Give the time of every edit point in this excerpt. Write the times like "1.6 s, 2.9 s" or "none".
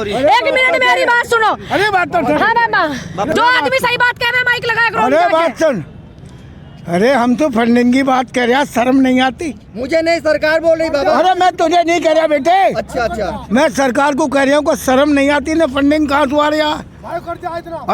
3.3 s